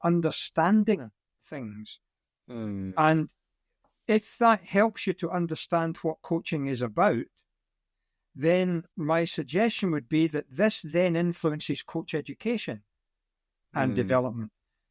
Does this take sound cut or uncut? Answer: uncut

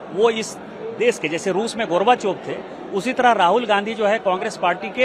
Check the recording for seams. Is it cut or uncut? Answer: uncut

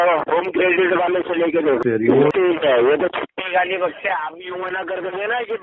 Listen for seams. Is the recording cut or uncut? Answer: cut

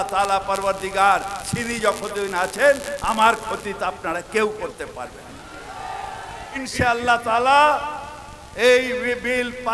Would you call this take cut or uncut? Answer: cut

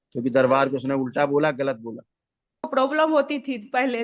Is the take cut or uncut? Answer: cut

